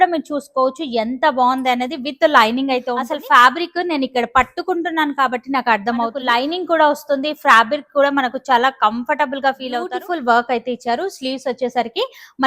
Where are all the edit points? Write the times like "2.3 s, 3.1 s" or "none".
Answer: 3.1 s, 6.2 s, 9.9 s